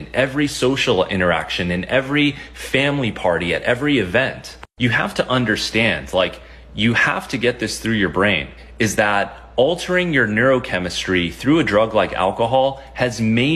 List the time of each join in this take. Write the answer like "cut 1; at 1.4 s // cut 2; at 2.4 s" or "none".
none